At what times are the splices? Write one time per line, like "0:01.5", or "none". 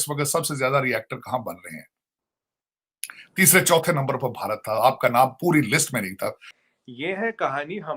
0:06.5